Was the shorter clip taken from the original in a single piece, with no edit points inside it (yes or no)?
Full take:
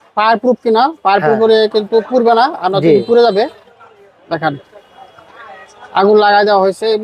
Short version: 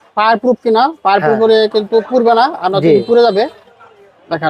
yes